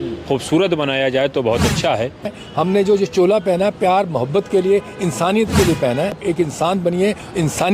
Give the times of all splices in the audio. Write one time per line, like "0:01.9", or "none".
0:02.4
0:06.2

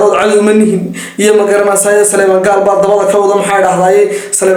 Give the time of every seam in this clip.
none

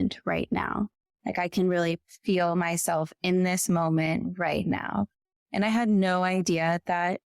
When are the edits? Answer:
0:01.1

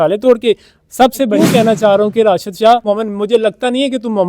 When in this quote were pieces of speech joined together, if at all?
0:01.3
0:02.9

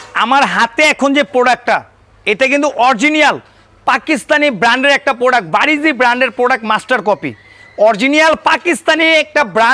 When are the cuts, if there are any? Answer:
none

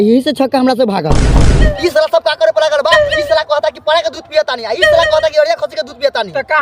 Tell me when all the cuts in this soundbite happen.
0:01.7

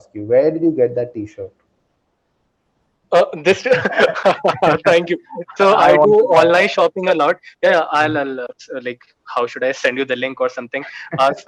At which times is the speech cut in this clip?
none

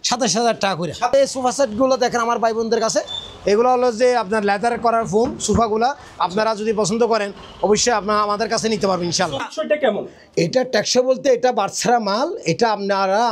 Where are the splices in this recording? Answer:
0:01.1
0:09.4

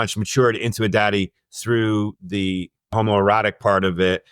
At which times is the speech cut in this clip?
0:02.9

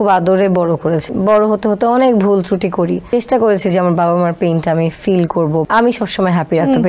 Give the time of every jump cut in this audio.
0:01.1
0:03.1
0:05.7

